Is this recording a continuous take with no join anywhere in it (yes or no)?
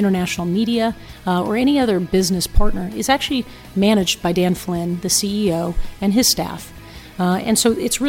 yes